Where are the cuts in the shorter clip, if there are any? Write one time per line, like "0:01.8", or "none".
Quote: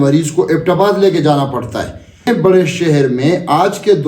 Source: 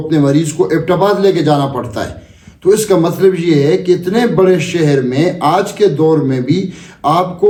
0:02.3

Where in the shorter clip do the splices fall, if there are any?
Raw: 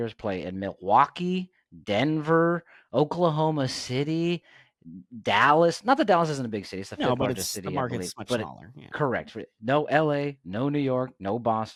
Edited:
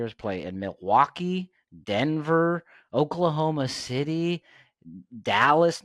none

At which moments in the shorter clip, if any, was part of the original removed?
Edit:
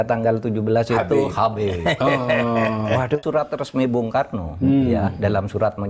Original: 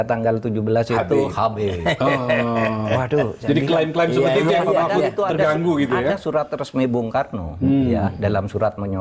0:03.2

